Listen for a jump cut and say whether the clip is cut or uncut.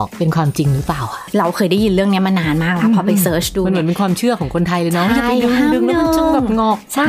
uncut